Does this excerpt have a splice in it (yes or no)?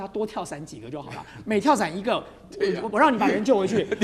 no